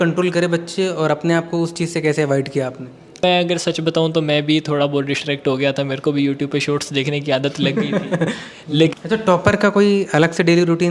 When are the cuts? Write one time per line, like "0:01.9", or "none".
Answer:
0:03.2
0:08.9